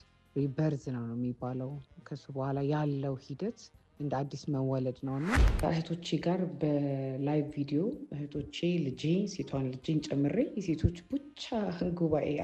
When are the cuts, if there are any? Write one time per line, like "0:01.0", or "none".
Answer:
0:05.6